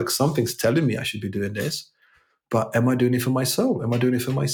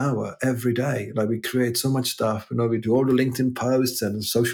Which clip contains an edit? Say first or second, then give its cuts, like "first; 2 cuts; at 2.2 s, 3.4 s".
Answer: second; 1 cut; at 2.8 s